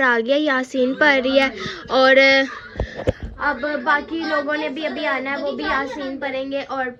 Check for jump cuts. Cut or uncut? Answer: uncut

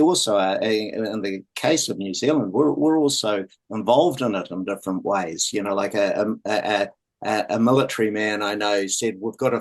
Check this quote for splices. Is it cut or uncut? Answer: uncut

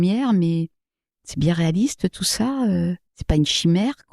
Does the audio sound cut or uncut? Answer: cut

